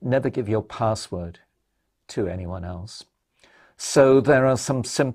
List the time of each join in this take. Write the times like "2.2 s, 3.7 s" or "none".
none

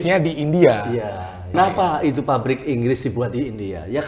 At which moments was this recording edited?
1.5 s

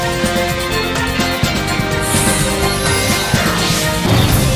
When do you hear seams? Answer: none

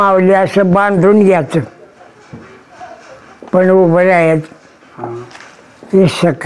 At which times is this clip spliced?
none

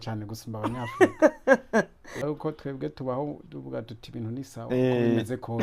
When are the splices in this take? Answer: 2.3 s

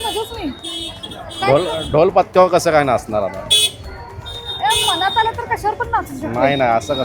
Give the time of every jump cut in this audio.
none

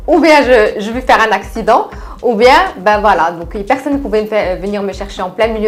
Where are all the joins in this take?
none

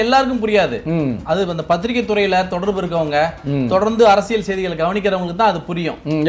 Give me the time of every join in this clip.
none

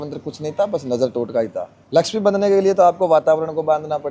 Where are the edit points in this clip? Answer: 1.7 s

